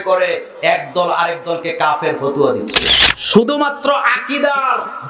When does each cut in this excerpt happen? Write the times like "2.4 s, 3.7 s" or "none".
2.8 s